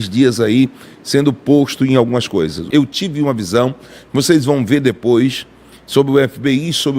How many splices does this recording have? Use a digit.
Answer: 1